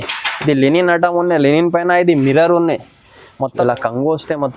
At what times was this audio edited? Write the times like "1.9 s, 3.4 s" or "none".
3.5 s